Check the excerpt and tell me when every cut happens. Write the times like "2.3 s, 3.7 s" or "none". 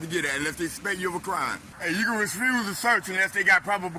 1.7 s